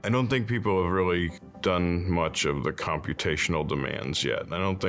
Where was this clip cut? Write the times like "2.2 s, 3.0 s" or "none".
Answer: 1.4 s

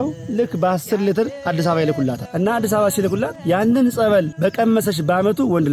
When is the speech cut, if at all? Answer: 1.4 s, 2.2 s, 3.4 s, 4.3 s

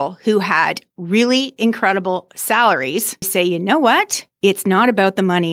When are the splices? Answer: 3.3 s, 4.2 s

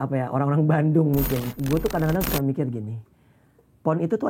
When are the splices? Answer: 1.5 s

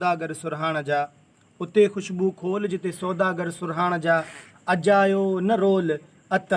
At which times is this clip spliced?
none

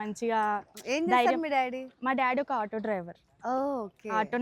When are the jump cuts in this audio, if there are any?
none

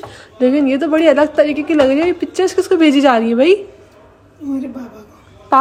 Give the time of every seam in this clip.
none

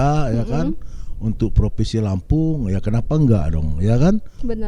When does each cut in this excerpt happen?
none

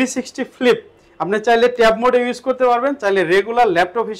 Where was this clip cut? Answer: none

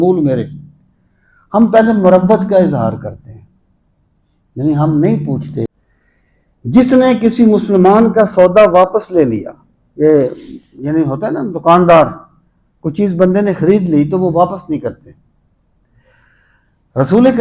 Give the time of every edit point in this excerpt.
5.7 s

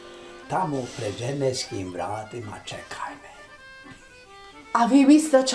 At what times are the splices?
none

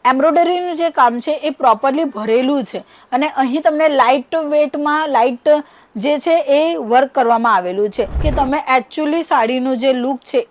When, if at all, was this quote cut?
8.2 s

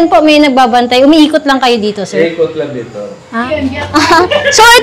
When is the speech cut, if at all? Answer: 3.4 s

